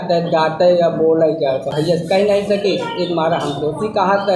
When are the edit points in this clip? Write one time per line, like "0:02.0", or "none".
0:01.7